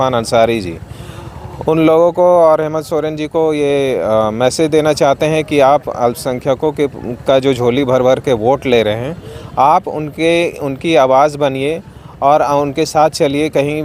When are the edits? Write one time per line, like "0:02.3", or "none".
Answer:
none